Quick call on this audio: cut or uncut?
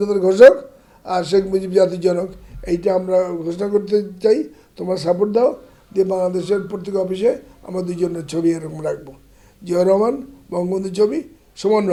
uncut